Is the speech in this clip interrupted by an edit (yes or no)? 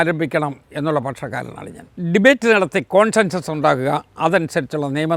no